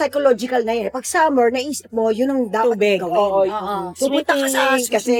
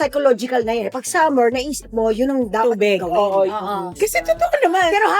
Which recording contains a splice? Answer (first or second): second